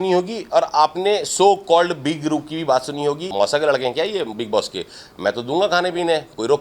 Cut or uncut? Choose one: cut